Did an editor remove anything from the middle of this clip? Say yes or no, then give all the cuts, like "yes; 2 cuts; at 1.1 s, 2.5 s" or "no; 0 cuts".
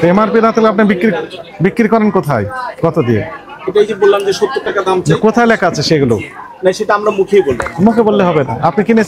no; 0 cuts